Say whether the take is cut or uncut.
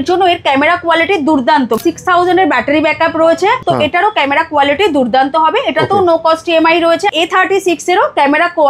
cut